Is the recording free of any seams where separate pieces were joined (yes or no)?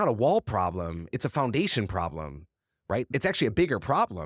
no